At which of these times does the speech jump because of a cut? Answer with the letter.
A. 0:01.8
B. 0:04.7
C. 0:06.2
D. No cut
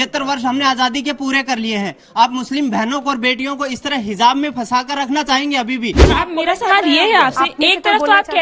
C